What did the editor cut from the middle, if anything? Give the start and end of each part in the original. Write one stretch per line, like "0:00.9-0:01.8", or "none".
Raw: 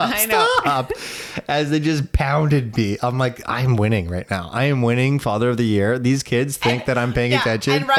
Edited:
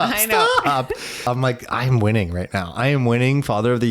0:01.2-0:03.0